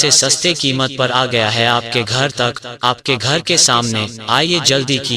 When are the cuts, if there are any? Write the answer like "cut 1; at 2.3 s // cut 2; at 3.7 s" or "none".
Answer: cut 1; at 4.2 s

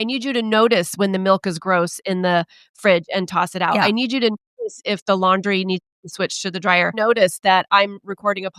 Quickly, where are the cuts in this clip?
cut 1; at 6.9 s

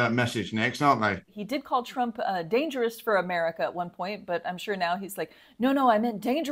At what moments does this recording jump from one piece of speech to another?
cut 1; at 1.4 s

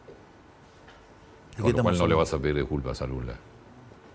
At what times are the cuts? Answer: none

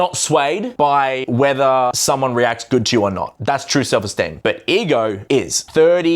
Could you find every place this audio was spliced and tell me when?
cut 1; at 0.9 s // cut 2; at 2.0 s // cut 3; at 3.3 s // cut 4; at 4.3 s // cut 5; at 5.3 s

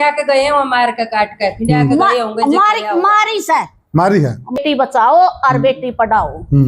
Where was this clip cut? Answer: cut 1; at 4.6 s

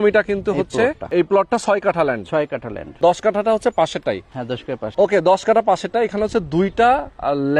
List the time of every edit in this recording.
cut 1; at 1.1 s // cut 2; at 3.0 s // cut 3; at 4.9 s

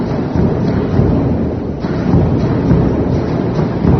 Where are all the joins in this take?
none

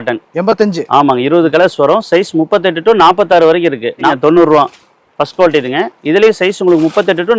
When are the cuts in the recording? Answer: cut 1; at 4.1 s

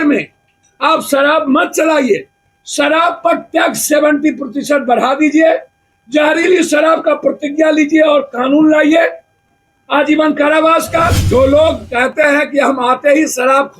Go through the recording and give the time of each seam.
cut 1; at 11.2 s

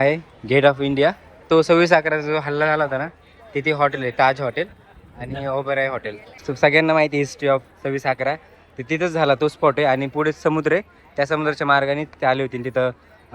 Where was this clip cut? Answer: cut 1; at 1.5 s // cut 2; at 6.5 s

